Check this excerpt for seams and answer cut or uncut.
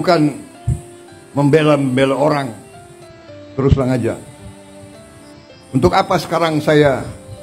uncut